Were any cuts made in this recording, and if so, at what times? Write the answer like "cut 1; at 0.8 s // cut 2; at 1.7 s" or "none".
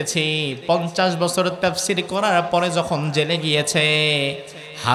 none